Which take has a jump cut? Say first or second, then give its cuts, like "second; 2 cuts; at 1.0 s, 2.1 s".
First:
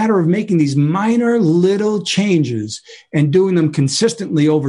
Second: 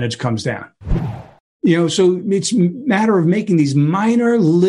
second; 1 cut; at 1.1 s